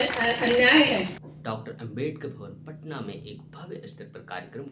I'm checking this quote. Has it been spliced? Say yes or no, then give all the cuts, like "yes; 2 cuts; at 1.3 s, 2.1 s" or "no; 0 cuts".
yes; 1 cut; at 1.4 s